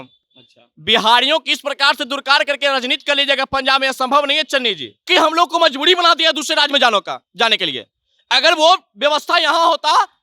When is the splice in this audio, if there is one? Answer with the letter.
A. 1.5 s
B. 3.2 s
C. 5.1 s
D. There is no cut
C